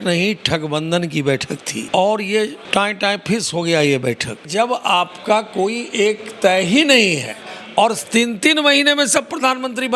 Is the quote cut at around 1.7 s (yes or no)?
yes